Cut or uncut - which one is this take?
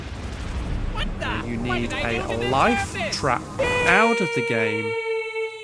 cut